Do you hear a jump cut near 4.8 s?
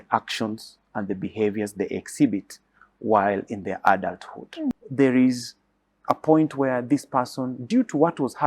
yes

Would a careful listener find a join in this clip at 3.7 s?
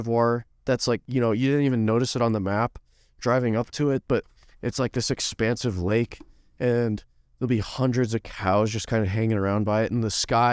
no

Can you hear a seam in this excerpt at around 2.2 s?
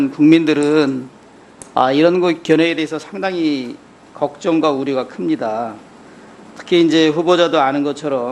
yes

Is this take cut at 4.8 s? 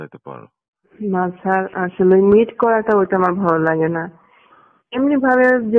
no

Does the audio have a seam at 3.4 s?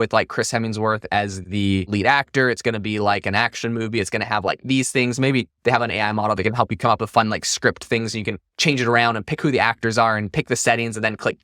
no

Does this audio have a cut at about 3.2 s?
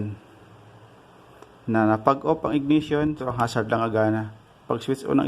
yes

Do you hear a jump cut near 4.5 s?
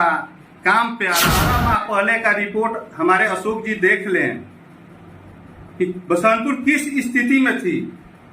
no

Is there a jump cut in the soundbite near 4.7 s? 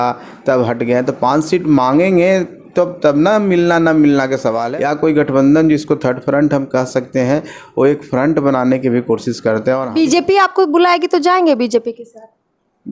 yes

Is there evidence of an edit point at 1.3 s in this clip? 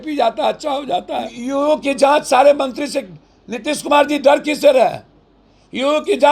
yes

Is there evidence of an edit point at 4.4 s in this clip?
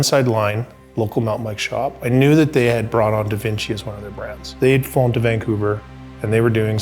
yes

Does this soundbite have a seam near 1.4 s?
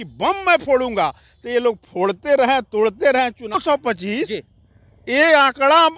no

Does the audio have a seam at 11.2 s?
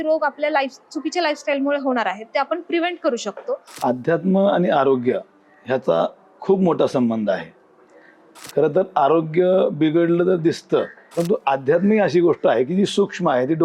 yes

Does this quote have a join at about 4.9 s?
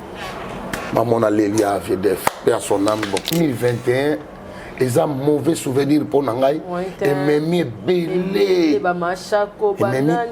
no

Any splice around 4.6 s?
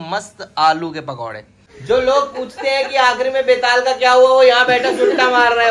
no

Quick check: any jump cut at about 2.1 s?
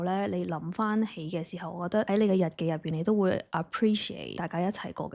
yes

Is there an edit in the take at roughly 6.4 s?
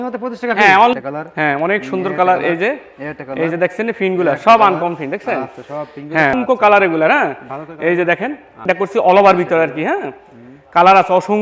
yes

